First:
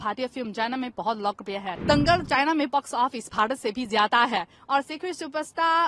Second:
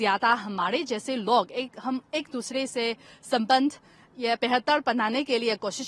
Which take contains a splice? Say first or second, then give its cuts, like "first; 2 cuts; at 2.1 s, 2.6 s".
first; 1 cut; at 1.7 s